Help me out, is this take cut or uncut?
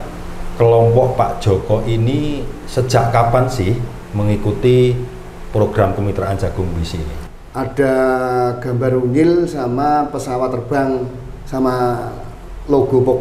cut